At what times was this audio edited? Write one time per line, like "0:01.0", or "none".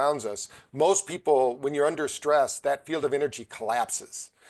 none